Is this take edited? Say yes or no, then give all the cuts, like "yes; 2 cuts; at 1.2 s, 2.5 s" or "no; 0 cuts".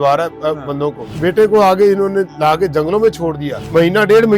no; 0 cuts